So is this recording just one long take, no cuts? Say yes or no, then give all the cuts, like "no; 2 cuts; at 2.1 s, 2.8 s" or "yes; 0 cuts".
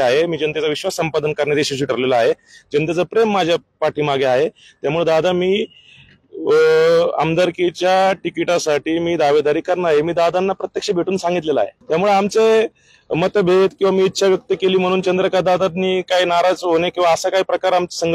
no; 1 cut; at 11.8 s